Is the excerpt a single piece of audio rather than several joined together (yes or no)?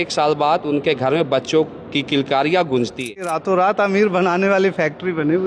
no